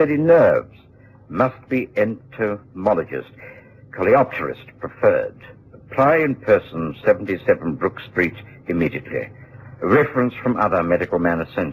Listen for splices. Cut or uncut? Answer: uncut